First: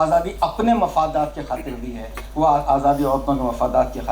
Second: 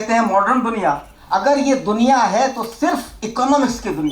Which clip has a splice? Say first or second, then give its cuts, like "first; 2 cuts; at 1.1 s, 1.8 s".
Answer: second; 1 cut; at 1.1 s